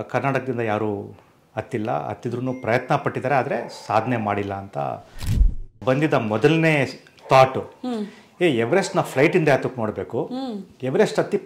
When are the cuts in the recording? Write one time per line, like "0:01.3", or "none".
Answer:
0:05.6